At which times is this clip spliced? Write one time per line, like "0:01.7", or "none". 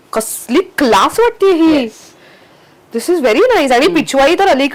none